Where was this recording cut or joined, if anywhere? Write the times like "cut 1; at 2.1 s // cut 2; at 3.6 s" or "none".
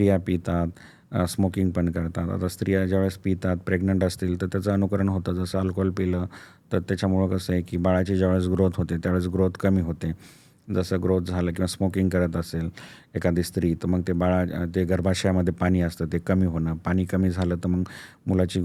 none